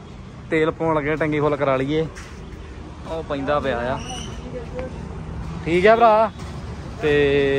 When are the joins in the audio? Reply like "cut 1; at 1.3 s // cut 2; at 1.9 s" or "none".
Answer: none